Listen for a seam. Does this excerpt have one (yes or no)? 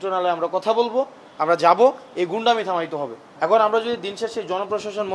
yes